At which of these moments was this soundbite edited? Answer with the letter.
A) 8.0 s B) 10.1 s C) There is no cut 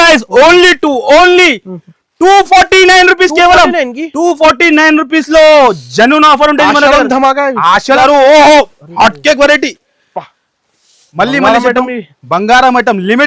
A